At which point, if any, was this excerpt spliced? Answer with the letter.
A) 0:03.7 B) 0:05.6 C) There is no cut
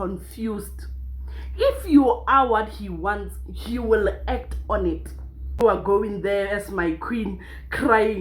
B